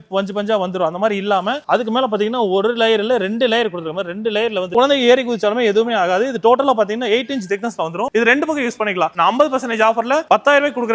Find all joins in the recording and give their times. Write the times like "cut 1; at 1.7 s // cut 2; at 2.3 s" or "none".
cut 1; at 4.7 s // cut 2; at 9.1 s